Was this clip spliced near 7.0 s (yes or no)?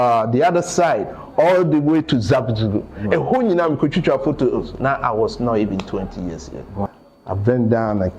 yes